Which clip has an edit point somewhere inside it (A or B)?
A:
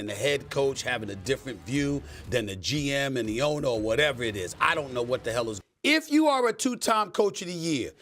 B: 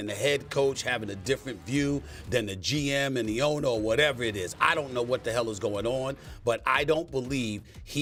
A